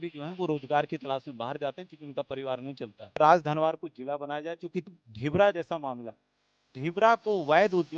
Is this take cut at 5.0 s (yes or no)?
yes